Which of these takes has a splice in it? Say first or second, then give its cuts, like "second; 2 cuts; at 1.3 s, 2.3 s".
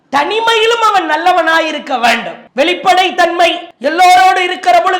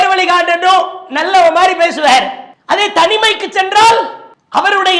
first; 2 cuts; at 2.4 s, 3.7 s